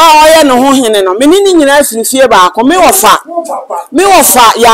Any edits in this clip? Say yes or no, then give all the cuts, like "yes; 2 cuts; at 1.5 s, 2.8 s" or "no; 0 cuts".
no; 0 cuts